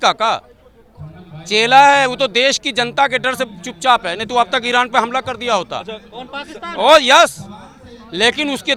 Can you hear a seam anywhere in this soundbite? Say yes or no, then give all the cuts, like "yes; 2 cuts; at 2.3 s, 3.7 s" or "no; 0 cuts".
no; 0 cuts